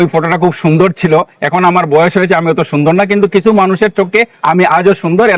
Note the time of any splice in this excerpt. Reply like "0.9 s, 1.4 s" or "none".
none